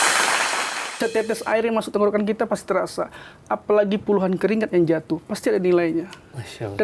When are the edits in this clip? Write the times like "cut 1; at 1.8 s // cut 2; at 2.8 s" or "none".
cut 1; at 1.0 s